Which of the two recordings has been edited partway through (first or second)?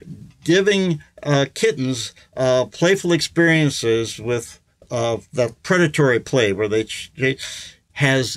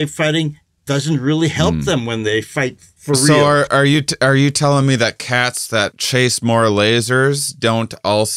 second